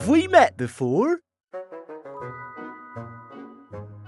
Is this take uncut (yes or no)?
no